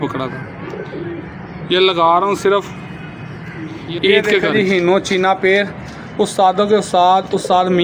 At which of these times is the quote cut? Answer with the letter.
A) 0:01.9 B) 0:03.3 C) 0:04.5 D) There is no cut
C